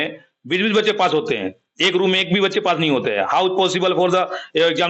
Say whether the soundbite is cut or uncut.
uncut